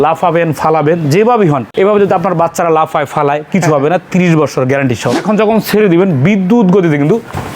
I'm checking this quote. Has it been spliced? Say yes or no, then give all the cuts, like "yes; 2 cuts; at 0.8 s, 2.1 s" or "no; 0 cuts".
yes; 2 cuts; at 1.7 s, 5.2 s